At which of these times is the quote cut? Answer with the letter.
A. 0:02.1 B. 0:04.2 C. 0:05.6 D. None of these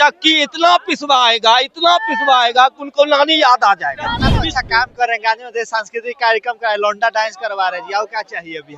B